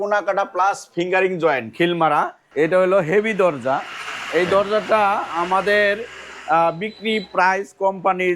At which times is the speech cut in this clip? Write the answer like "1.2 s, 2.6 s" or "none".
2.4 s